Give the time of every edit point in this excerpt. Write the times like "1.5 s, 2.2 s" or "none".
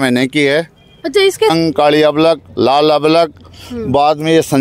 1.5 s